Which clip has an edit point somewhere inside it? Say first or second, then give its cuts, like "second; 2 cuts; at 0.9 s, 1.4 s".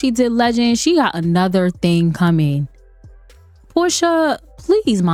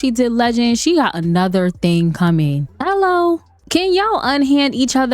second; 2 cuts; at 2.7 s, 3.5 s